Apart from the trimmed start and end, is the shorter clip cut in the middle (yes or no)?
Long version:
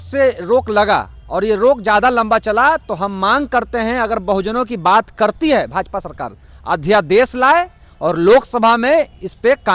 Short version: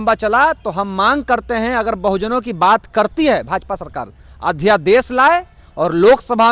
no